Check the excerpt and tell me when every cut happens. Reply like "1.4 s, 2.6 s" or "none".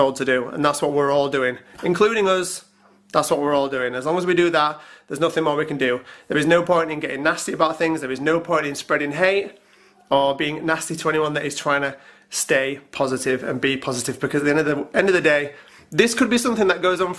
none